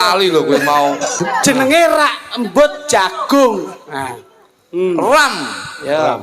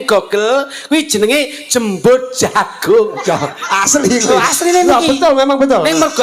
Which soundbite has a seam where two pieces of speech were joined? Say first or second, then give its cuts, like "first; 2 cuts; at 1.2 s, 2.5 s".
first; 1 cut; at 1.2 s